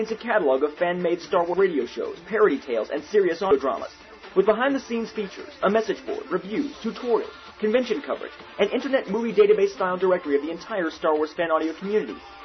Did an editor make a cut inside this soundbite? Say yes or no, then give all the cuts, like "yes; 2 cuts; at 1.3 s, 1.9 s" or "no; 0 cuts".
yes; 2 cuts; at 1.5 s, 3.5 s